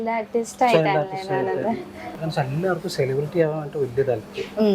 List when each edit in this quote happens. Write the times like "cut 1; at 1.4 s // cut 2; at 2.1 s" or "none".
cut 1; at 2.2 s

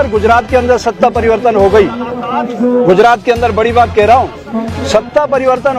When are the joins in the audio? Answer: none

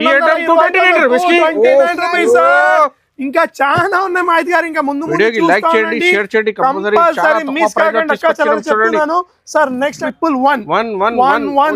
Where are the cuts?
cut 1; at 10.0 s

